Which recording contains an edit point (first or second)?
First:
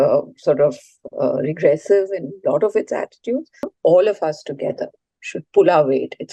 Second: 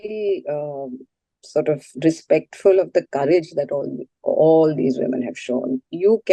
first